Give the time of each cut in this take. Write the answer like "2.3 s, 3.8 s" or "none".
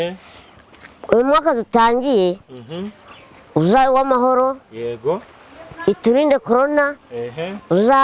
none